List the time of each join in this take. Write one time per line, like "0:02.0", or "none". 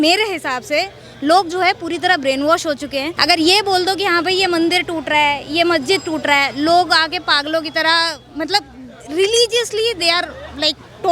0:03.1